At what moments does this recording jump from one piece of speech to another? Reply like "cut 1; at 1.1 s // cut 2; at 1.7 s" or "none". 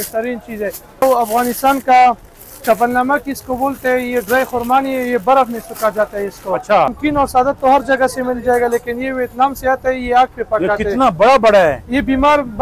cut 1; at 1.0 s // cut 2; at 7.0 s